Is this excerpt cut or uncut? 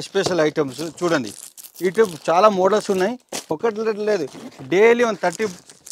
uncut